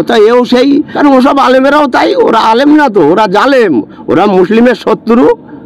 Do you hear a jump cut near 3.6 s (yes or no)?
no